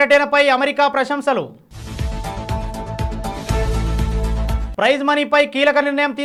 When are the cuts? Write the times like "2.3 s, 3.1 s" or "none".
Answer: none